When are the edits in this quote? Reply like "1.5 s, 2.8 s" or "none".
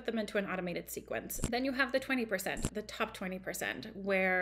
1.3 s